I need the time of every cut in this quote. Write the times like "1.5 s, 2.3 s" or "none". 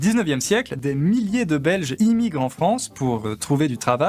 0.8 s, 1.9 s